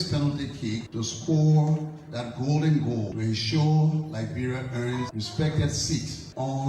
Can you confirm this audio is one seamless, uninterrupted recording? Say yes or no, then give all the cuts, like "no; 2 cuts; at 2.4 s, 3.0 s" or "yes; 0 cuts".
no; 1 cut; at 5.1 s